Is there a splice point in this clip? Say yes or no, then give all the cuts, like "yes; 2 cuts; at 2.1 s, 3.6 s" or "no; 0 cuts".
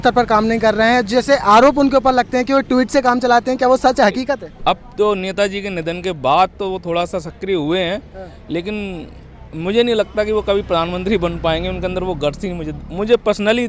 no; 0 cuts